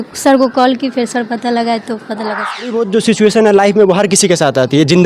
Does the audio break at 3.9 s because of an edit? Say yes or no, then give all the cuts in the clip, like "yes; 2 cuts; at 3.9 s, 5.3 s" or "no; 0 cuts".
no; 1 cut; at 2.7 s